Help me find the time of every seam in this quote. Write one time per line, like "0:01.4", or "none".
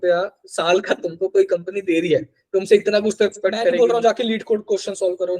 0:03.7